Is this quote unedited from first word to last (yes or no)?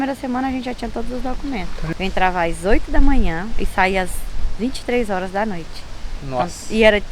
no